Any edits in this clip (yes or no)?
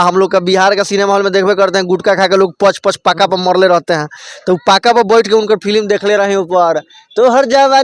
no